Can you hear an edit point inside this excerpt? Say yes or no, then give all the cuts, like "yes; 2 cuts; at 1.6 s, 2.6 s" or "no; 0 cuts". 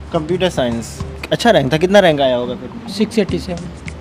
no; 0 cuts